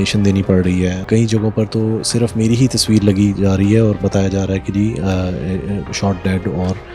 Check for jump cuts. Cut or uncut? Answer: cut